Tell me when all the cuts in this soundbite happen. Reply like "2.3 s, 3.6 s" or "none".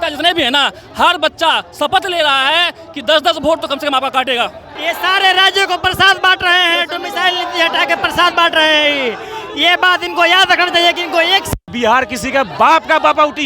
4.7 s, 11.6 s